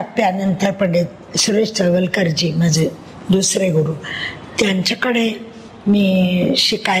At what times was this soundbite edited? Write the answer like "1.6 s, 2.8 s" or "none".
none